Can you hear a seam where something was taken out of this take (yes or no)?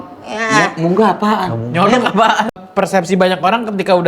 yes